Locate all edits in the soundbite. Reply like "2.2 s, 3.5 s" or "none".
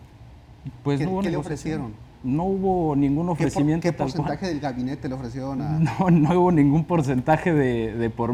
none